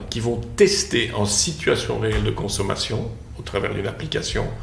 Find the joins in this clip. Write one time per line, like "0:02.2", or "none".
none